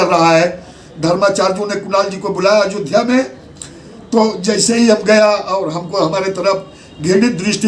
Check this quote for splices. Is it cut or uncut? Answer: uncut